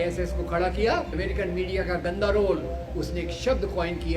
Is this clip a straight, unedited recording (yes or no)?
no